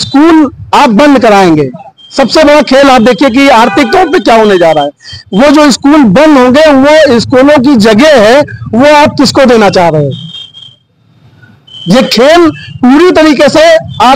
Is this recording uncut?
yes; 0 cuts

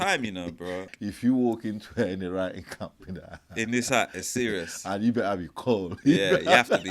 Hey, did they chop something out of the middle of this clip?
yes; 1 cut; at 0.9 s

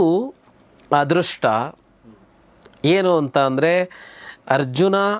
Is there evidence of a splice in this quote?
no; 0 cuts

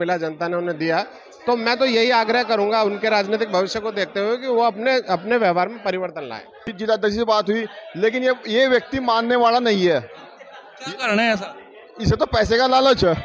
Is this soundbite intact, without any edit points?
no; 1 cut; at 6.8 s

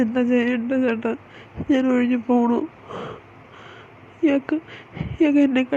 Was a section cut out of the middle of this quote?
no; 0 cuts

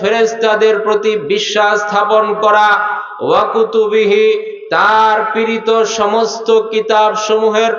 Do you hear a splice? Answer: no; 0 cuts

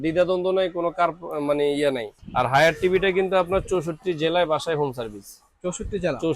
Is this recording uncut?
no; 1 cut; at 2.2 s

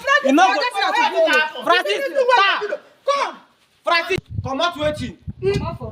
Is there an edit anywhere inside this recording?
yes; 1 cut; at 4.2 s

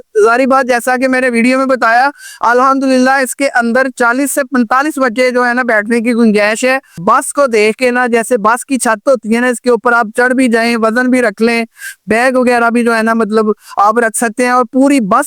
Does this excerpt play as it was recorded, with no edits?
no; 1 cut; at 7.0 s

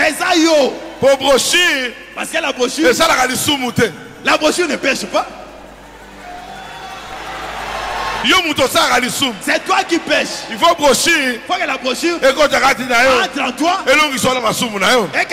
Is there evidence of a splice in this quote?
no; 0 cuts

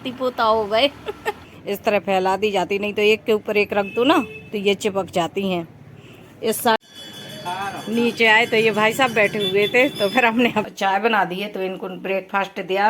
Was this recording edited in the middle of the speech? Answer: yes; 3 cuts; at 1.3 s, 6.8 s, 10.7 s

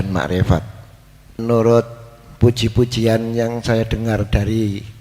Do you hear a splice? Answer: yes; 1 cut; at 1.4 s

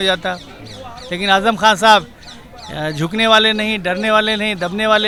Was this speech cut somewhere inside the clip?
no; 0 cuts

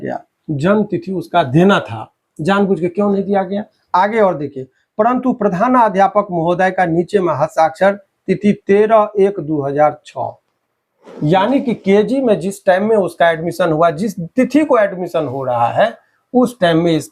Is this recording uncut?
yes; 0 cuts

